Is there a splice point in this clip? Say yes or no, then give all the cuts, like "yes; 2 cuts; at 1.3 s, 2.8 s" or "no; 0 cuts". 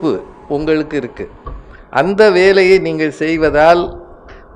no; 0 cuts